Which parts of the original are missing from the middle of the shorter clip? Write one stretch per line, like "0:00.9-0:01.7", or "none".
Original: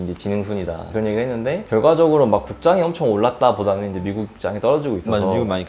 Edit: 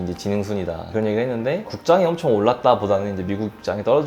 0:01.7-0:02.4